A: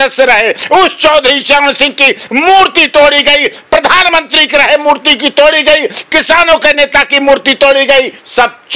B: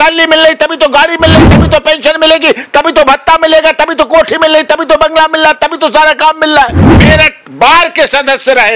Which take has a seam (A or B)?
B